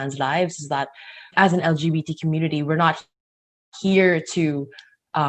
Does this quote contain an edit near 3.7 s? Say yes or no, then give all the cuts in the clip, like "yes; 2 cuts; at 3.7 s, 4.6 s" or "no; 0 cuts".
no; 1 cut; at 1.3 s